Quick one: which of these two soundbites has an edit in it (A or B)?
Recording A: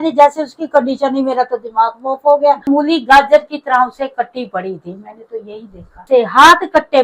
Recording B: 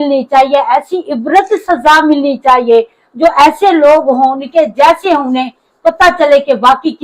A